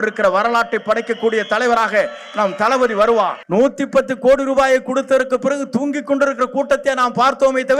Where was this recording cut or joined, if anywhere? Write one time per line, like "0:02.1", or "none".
0:03.4